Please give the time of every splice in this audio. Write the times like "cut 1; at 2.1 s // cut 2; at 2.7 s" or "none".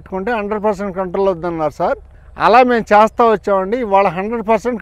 none